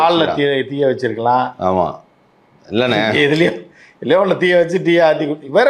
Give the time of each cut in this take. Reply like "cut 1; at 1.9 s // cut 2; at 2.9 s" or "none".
none